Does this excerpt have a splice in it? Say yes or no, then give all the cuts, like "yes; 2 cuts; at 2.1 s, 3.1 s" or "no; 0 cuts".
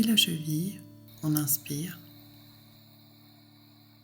yes; 1 cut; at 2.0 s